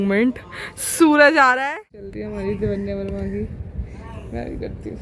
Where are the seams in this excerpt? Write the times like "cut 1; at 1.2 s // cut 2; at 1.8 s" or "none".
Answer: cut 1; at 2.2 s